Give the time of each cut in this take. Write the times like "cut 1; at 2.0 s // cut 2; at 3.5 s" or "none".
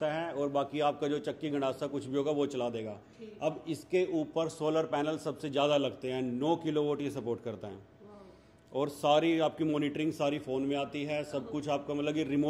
none